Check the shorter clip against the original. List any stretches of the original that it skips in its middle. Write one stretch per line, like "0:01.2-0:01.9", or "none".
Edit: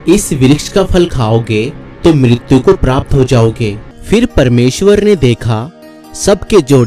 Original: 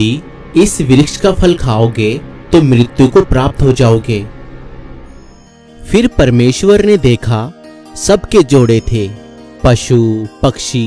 0:04.4-0:05.7